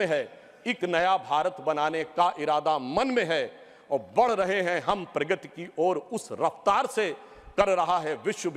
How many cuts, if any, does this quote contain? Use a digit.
0